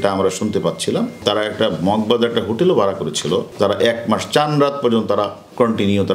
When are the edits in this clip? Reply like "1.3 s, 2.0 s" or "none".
1.2 s, 3.5 s